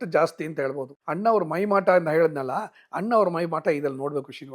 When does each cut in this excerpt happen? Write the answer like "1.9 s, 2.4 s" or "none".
1.0 s